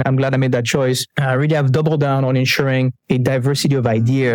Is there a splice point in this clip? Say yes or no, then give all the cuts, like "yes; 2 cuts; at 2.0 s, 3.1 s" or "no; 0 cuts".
yes; 2 cuts; at 1.1 s, 3.0 s